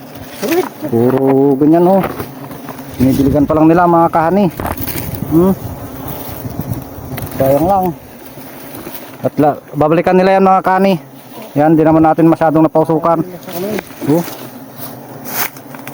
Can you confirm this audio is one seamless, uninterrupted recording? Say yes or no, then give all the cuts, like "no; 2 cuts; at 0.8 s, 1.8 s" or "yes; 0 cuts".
yes; 0 cuts